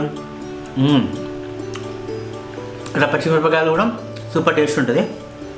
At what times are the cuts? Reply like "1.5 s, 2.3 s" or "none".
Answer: 1.1 s, 2.9 s